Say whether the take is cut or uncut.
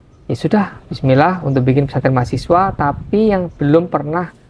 uncut